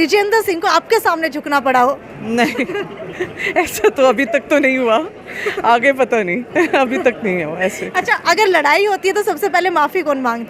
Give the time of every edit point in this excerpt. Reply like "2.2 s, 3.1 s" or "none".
none